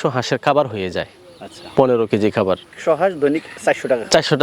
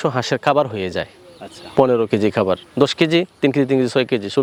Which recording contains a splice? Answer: first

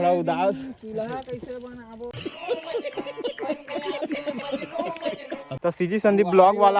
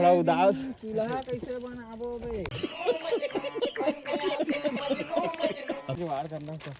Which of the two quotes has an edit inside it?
first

